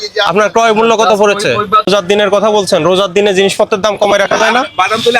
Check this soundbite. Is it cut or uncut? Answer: cut